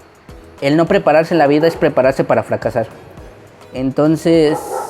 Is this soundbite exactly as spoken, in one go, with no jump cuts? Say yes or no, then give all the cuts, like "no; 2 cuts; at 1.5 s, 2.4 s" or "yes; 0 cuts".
yes; 0 cuts